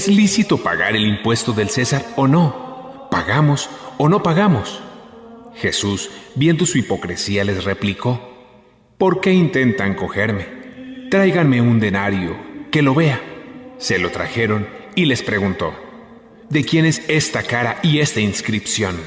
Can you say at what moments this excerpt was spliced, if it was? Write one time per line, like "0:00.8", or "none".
none

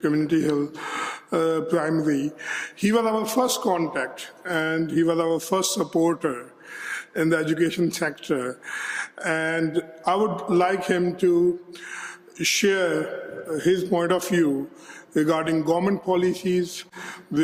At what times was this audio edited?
none

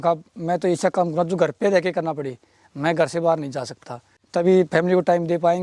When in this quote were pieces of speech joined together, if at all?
0:04.2

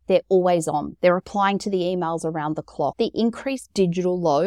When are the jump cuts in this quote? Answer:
0:02.9

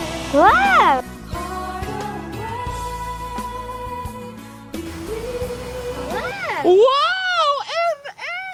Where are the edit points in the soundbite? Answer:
none

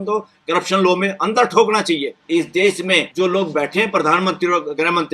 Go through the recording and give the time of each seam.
0:02.1
0:03.1

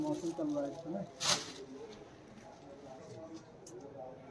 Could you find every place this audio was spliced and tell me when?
0:03.0

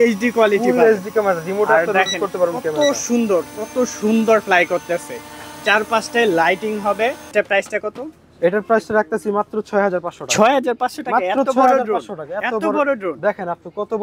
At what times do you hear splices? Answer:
0:07.3

